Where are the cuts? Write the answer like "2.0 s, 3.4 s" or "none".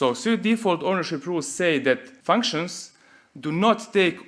2.1 s